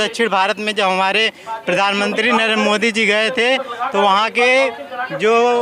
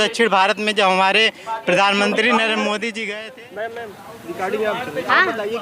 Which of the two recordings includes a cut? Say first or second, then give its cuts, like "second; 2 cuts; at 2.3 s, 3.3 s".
second; 1 cut; at 3.0 s